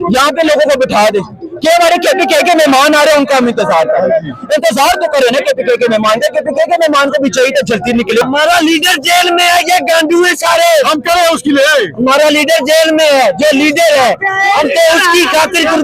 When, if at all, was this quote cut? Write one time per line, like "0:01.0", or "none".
none

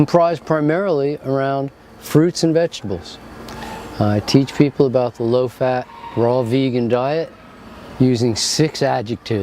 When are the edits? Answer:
0:02.1

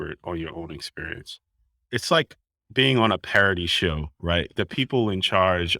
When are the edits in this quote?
0:01.9
0:04.5

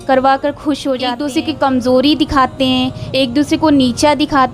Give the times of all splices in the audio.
0:01.1

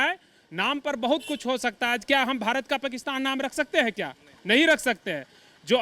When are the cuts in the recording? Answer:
none

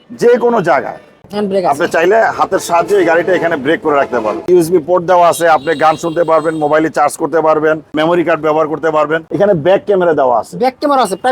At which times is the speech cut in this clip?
0:01.2
0:04.5
0:07.9
0:09.2

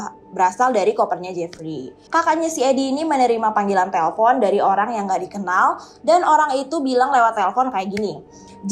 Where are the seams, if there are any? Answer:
0:02.0

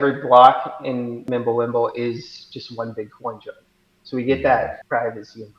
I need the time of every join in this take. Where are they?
0:01.2
0:04.8

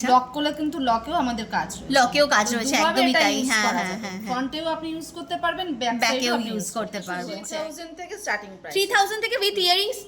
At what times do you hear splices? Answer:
0:07.4

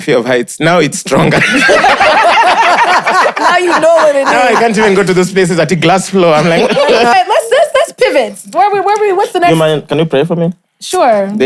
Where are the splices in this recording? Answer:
0:07.1

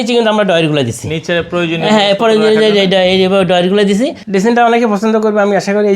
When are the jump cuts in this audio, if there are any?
0:04.2

